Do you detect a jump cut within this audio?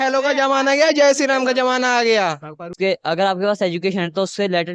yes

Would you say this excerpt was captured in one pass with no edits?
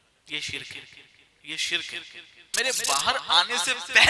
no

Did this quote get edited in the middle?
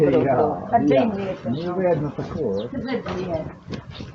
no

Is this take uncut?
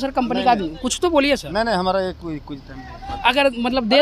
yes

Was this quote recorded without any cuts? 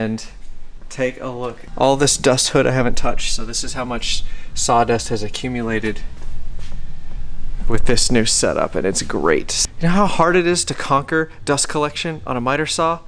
no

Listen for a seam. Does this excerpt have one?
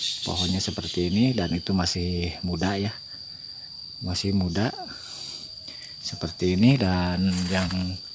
no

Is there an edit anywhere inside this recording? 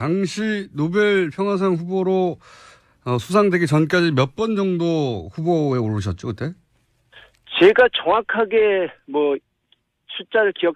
no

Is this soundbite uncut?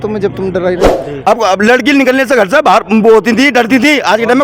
no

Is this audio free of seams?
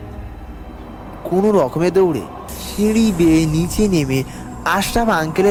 yes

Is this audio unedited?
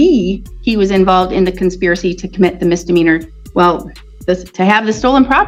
yes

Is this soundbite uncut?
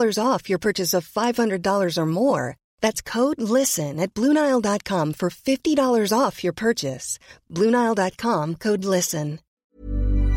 no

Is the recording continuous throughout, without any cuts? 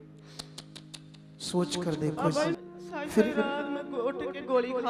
no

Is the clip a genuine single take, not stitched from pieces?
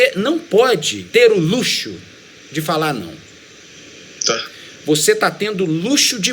no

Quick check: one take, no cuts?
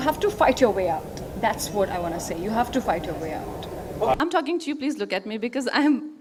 yes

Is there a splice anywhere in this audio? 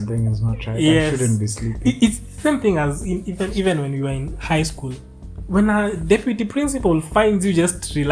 no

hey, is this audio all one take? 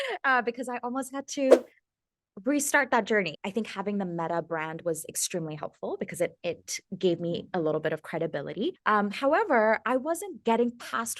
no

